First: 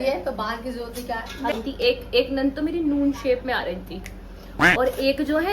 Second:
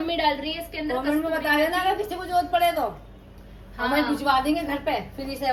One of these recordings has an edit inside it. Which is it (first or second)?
first